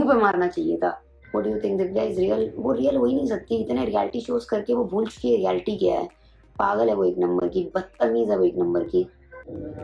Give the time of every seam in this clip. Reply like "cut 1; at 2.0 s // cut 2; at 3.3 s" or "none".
cut 1; at 1.1 s